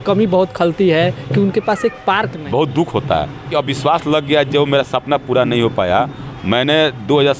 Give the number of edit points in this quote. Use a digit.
3